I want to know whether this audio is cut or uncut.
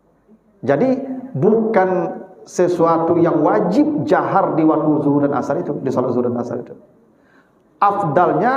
uncut